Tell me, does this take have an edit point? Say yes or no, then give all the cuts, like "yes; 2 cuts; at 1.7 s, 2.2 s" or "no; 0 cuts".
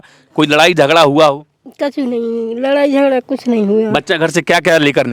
no; 0 cuts